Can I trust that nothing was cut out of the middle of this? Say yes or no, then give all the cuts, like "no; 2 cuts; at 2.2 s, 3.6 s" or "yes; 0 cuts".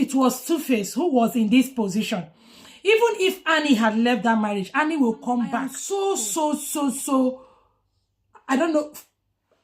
no; 1 cut; at 5.8 s